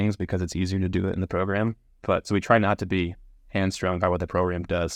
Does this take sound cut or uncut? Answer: uncut